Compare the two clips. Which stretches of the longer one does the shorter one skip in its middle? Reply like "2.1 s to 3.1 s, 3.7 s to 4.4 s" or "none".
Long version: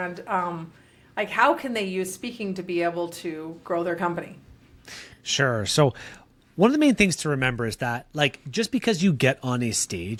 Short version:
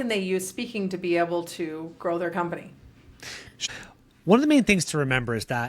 5.3 s to 6.0 s